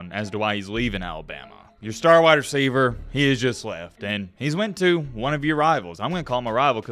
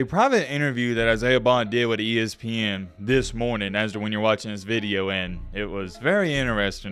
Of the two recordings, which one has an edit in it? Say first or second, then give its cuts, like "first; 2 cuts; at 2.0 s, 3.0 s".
first; 1 cut; at 1.6 s